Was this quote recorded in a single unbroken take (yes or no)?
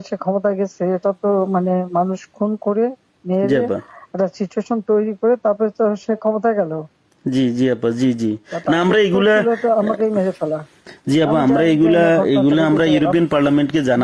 yes